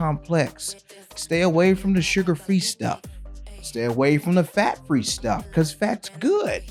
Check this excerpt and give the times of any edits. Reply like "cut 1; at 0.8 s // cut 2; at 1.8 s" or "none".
none